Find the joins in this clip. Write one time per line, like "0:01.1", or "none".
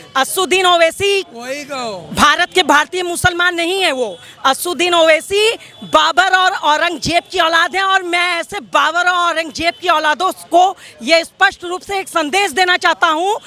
none